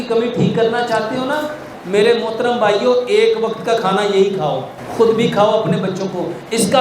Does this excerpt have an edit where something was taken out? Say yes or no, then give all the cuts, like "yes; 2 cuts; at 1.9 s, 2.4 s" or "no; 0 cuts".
yes; 2 cuts; at 1.7 s, 4.8 s